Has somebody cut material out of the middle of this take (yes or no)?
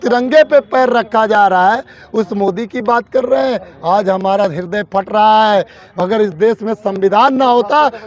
no